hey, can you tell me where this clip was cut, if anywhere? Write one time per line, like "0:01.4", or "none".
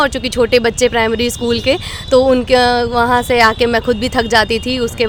none